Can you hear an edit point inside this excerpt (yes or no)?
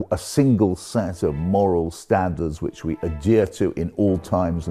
no